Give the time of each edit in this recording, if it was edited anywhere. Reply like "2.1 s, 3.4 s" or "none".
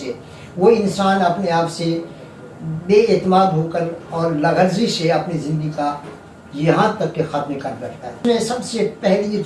8.2 s